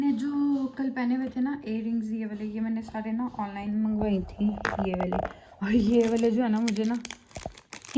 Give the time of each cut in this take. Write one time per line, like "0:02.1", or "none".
none